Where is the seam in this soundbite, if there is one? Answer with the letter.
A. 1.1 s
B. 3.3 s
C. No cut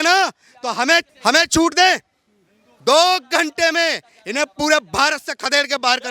A